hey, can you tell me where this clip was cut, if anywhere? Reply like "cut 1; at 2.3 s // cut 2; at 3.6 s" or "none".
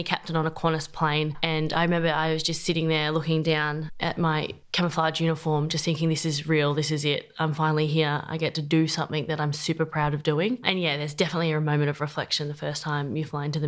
none